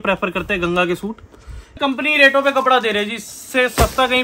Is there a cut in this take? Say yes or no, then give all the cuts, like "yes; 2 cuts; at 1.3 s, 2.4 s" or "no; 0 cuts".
yes; 1 cut; at 1.8 s